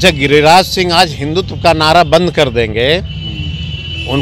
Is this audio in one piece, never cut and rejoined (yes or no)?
yes